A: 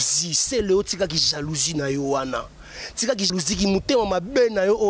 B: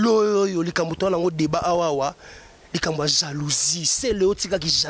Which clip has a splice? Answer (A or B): A